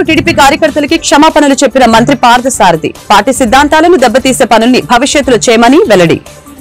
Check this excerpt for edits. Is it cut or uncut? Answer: uncut